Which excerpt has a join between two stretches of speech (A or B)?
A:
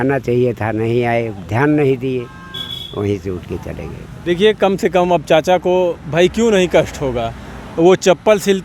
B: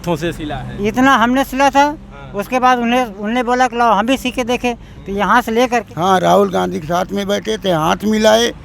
B